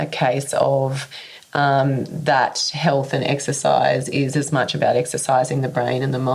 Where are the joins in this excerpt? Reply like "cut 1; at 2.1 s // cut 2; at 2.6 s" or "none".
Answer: none